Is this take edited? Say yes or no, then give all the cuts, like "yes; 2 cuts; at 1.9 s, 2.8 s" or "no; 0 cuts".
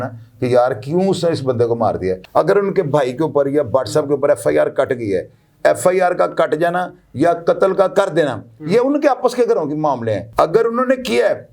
yes; 2 cuts; at 2.2 s, 10.2 s